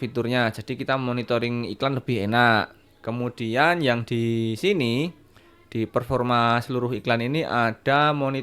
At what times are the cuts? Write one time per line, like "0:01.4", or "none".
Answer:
none